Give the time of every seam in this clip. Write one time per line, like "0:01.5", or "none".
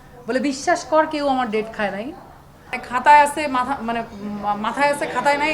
0:02.8